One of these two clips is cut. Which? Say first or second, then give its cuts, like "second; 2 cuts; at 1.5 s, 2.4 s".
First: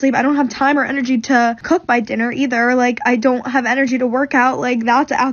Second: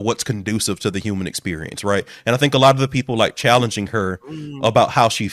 first; 1 cut; at 1.6 s